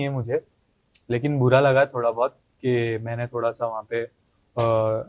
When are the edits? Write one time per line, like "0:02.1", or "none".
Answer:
none